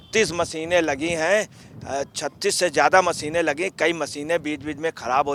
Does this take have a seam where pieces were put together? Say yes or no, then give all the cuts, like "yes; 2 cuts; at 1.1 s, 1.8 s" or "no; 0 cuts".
no; 0 cuts